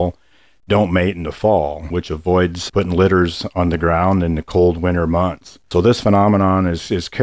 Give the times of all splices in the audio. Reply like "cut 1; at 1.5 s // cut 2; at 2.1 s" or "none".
cut 1; at 1.8 s // cut 2; at 5.6 s